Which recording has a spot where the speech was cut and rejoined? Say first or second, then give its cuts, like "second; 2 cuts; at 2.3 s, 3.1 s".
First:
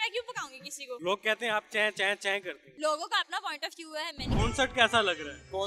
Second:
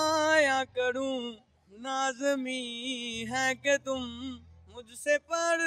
first; 3 cuts; at 1.0 s, 2.6 s, 4.2 s